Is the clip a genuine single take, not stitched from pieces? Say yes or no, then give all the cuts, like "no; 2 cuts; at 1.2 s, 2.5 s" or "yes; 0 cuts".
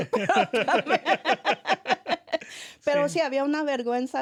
yes; 0 cuts